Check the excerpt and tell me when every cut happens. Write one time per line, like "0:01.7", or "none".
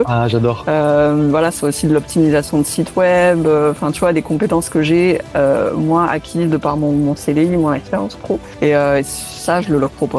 0:08.5